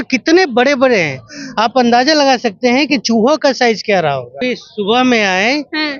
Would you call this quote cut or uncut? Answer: cut